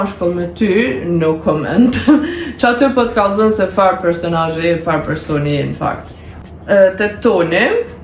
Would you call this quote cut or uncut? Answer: uncut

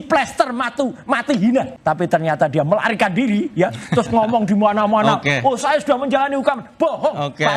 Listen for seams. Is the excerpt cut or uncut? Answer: cut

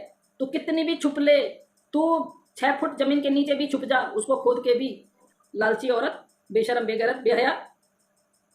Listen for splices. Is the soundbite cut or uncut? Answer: cut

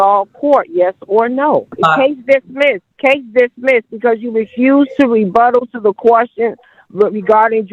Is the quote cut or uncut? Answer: cut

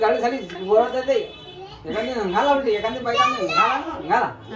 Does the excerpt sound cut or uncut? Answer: uncut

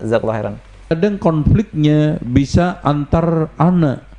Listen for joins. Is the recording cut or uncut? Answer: cut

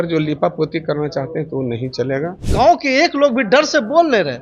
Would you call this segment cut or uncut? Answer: cut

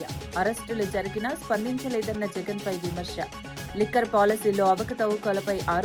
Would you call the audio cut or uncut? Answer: uncut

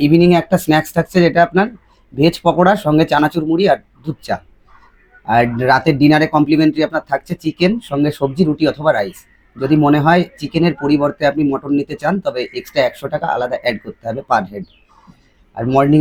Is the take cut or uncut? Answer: uncut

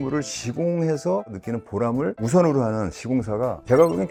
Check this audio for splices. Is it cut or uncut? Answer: uncut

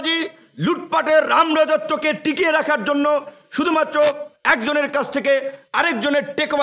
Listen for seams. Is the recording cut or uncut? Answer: uncut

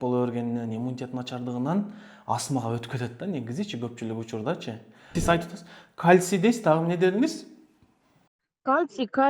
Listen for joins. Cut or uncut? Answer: cut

